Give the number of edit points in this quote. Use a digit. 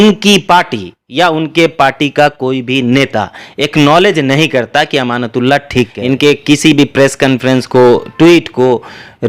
1